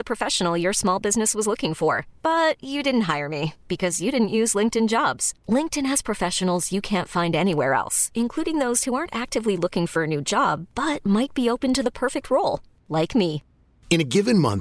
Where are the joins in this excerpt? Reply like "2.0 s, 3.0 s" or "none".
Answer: none